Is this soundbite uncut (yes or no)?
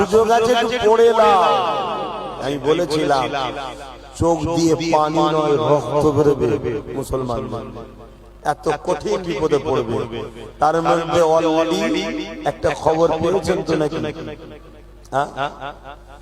no